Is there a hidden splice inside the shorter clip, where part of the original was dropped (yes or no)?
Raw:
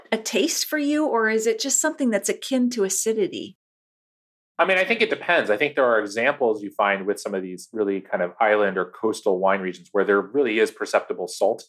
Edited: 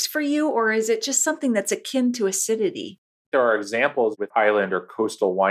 yes